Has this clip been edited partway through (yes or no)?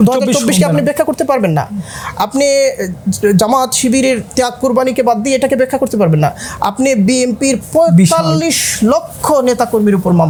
no